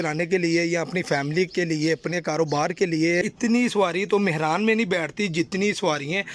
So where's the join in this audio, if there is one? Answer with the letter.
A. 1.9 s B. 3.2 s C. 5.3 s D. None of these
B